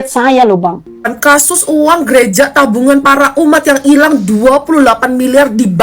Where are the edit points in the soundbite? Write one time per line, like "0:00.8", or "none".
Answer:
0:01.1